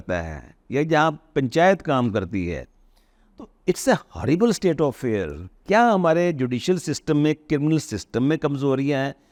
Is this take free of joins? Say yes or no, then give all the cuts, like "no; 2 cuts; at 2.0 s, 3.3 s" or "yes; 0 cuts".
yes; 0 cuts